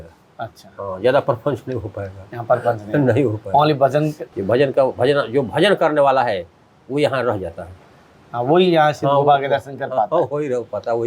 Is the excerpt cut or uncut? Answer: cut